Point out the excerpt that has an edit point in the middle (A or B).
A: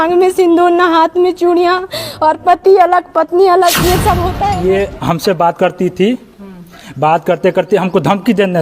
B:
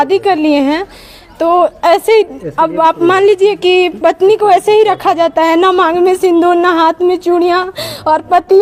A